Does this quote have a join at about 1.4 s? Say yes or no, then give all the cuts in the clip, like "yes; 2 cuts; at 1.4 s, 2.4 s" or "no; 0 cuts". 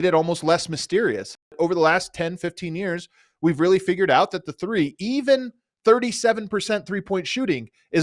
yes; 1 cut; at 1.4 s